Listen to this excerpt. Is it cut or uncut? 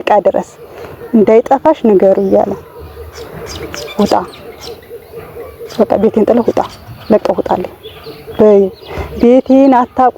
uncut